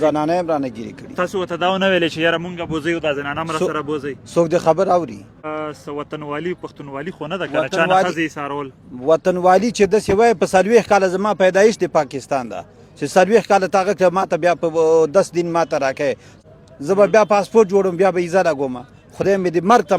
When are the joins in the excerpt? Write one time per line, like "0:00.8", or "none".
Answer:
0:05.5
0:16.3